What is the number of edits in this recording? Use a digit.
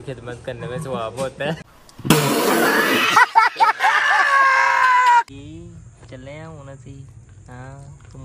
1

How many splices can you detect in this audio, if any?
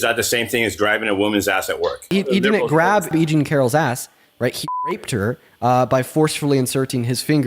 2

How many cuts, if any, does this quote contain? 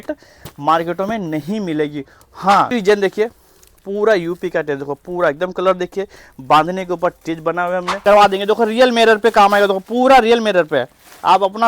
2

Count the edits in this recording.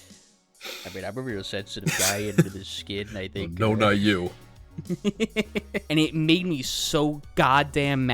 1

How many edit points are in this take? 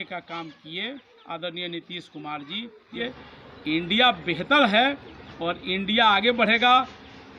1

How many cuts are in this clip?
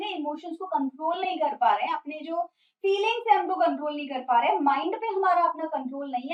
0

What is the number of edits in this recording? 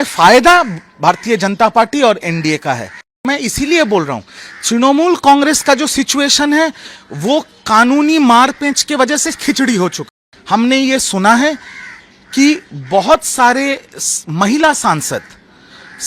2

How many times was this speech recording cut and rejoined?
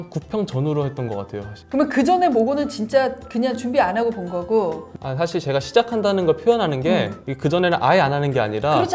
0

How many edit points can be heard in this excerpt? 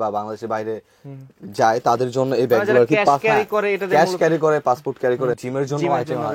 1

